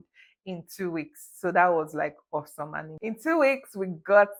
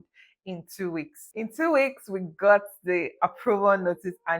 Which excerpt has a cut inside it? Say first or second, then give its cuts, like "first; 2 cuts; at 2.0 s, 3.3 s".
second; 1 cut; at 1.2 s